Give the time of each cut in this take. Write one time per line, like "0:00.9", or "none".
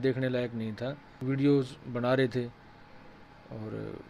0:01.2